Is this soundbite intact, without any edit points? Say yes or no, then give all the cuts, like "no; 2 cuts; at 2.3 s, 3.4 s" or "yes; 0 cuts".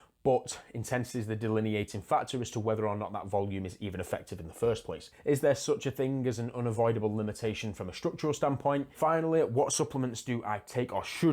no; 2 cuts; at 5.1 s, 8.9 s